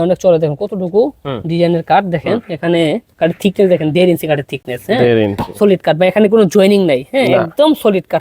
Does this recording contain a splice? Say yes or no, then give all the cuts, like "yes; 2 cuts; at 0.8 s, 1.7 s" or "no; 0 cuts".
no; 0 cuts